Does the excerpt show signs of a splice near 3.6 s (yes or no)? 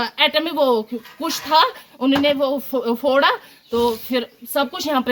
no